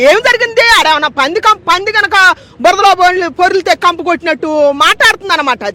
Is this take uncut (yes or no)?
yes